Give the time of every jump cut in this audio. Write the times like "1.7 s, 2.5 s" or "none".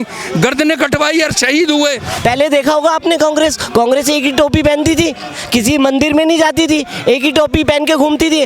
2.1 s